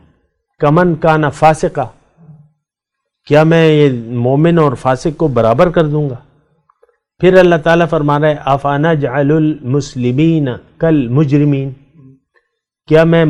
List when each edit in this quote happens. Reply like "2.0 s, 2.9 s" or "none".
none